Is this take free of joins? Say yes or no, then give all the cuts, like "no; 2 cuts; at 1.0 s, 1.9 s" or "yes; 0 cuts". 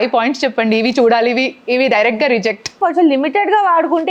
no; 1 cut; at 2.7 s